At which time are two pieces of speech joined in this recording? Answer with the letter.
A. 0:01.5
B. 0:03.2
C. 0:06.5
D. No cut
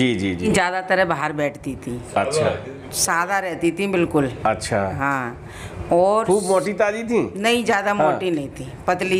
D